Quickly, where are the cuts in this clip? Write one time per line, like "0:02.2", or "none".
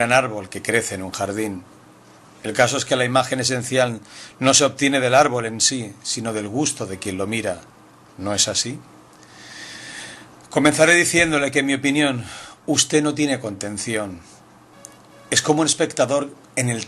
0:02.8